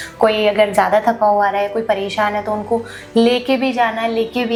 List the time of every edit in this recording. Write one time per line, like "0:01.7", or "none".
none